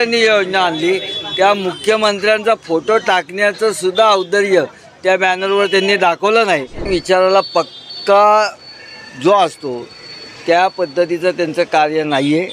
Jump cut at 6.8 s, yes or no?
yes